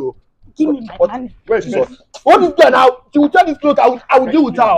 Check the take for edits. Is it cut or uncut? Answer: uncut